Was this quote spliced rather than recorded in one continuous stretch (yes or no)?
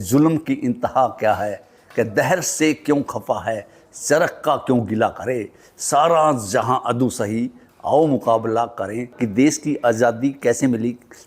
yes